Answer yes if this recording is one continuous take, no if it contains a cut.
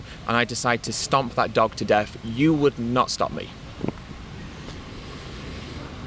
yes